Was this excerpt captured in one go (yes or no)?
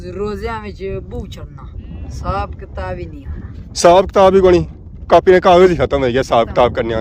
yes